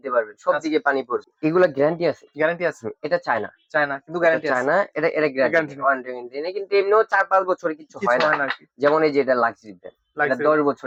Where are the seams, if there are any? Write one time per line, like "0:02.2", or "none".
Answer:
none